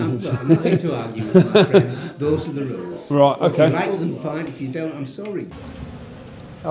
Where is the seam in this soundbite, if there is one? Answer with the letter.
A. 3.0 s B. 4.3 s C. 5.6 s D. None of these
C